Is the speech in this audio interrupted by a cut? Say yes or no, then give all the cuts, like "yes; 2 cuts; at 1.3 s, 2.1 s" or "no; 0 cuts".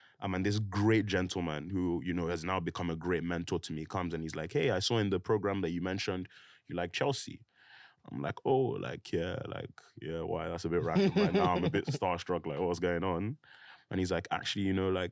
no; 0 cuts